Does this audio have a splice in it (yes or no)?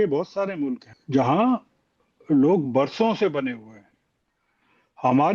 yes